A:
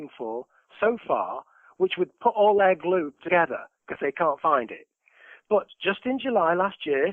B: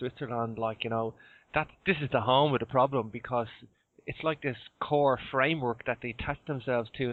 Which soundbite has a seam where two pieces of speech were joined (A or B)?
A